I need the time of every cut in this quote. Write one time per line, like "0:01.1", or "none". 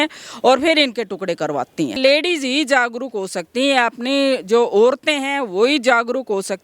0:02.0